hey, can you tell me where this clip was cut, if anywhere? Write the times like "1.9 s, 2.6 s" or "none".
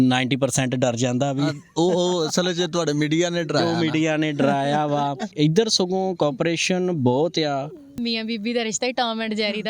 5.3 s, 8.0 s